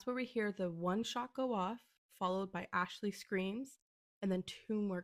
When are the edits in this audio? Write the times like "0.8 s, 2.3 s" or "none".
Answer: none